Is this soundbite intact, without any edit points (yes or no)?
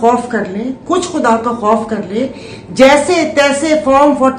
yes